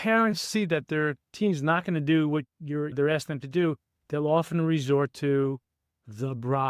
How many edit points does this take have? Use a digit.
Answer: 1